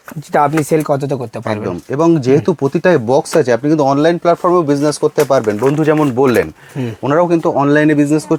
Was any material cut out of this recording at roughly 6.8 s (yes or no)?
no